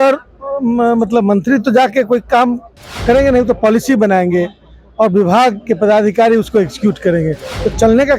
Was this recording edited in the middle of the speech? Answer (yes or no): no